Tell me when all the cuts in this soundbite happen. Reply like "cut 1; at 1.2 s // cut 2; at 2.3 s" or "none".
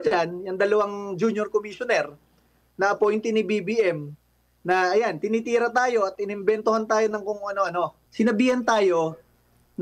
cut 1; at 8.0 s

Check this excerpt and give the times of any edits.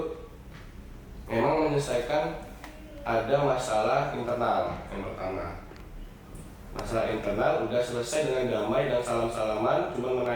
none

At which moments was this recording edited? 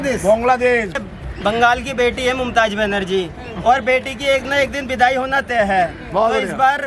cut 1; at 1.0 s

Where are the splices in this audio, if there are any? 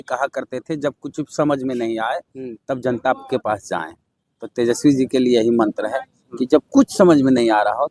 none

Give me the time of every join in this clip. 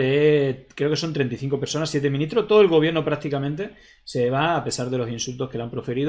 none

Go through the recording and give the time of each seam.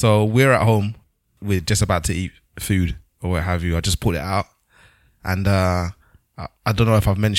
cut 1; at 1.0 s

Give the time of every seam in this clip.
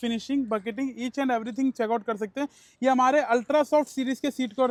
none

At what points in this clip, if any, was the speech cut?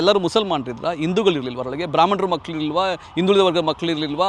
none

